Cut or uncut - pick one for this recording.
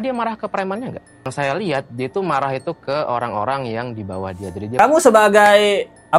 cut